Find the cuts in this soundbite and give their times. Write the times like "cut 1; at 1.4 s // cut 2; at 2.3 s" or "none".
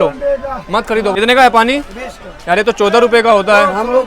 cut 1; at 1.1 s